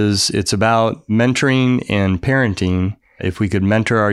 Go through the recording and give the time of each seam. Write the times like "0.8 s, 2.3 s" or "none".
1.0 s, 3.2 s